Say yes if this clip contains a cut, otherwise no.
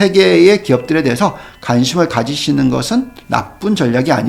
no